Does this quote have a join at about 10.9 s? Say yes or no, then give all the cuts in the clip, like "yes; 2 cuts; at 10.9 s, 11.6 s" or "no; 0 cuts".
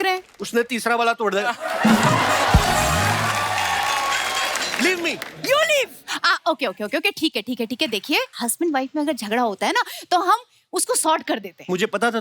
no; 1 cut; at 4.7 s